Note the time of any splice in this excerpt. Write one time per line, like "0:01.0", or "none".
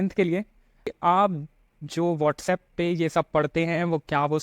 0:00.9

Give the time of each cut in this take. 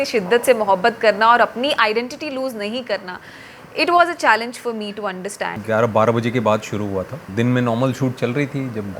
0:05.6
0:07.3

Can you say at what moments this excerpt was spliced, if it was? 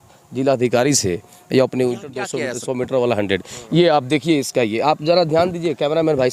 0:02.3

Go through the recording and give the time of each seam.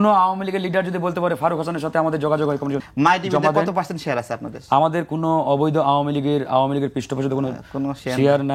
0:02.8

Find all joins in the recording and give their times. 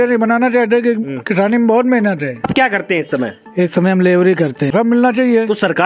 0:02.5
0:04.7

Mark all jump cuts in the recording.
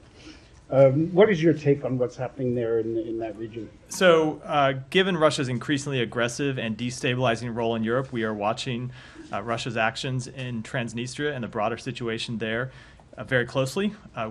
0:01.9
0:07.0
0:11.9

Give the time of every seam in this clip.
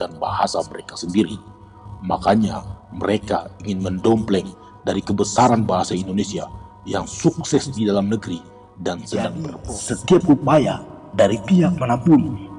0:09.7

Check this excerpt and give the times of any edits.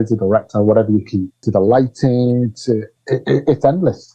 0:01.4
0:02.9

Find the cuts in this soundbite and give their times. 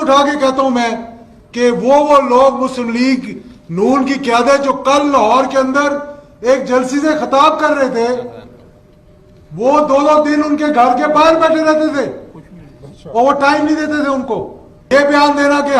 0:14.9

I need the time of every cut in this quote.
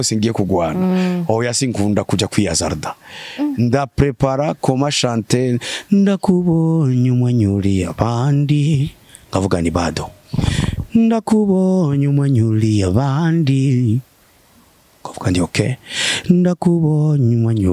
none

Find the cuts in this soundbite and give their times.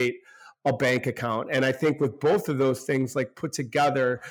none

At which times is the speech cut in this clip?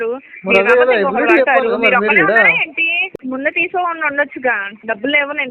0:03.0

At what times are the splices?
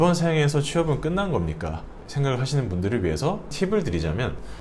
0:02.0
0:03.5

